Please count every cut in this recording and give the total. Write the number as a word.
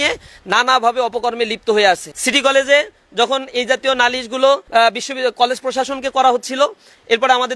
two